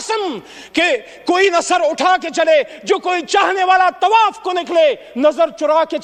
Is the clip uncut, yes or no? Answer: yes